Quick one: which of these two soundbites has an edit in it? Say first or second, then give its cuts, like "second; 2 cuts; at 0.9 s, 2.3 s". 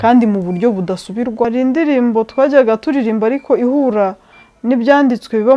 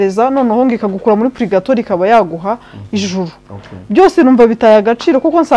first; 1 cut; at 1.5 s